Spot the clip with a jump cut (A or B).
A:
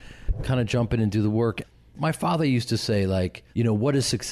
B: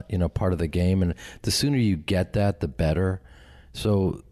A